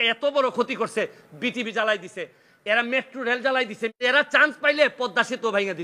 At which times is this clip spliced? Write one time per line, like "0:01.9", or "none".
0:04.0